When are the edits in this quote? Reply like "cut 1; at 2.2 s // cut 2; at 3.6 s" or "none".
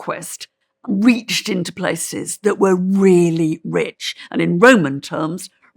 none